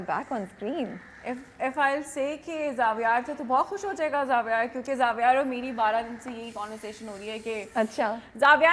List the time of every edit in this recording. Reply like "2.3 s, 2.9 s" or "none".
none